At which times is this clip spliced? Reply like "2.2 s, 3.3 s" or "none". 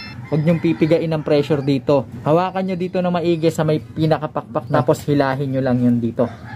2.1 s, 4.7 s